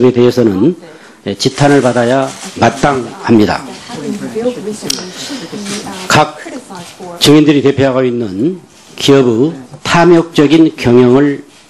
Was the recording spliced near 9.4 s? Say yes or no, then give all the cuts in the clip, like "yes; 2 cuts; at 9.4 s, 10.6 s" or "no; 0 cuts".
no; 0 cuts